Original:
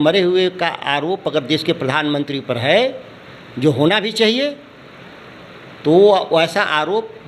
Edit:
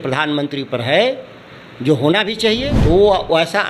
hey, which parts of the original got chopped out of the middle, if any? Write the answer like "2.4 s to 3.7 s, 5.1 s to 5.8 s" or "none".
4.5 s to 5.7 s